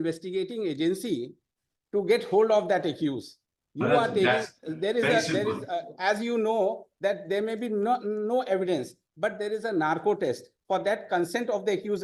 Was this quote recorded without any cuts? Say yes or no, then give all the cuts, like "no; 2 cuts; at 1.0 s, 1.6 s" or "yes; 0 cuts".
yes; 0 cuts